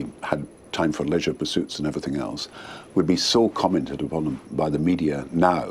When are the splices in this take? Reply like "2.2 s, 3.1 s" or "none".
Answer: 3.3 s